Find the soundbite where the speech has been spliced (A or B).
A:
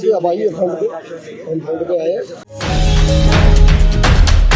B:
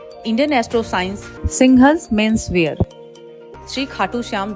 A